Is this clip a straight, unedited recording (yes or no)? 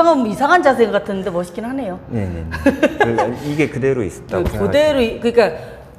yes